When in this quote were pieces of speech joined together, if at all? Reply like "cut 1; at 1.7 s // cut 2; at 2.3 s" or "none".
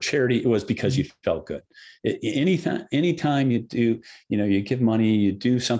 none